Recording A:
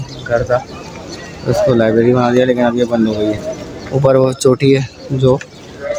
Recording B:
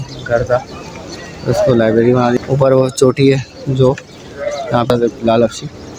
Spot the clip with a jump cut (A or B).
B